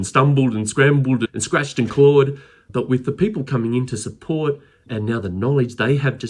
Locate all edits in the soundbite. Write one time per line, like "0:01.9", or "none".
0:01.3
0:02.7
0:04.9